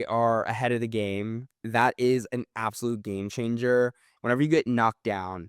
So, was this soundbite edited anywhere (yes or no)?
yes